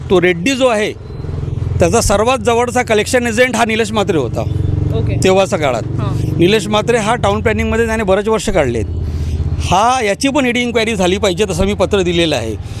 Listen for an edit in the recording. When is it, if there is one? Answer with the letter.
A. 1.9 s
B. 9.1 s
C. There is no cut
C